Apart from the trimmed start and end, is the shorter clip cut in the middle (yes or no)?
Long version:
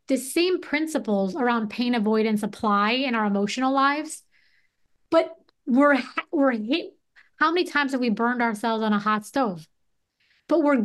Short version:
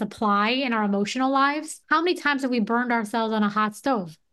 yes